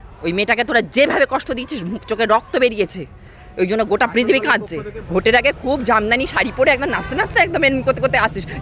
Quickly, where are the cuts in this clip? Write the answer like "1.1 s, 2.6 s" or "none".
5.0 s